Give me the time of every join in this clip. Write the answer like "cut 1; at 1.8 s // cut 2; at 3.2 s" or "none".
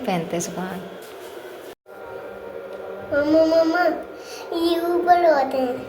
cut 1; at 1.8 s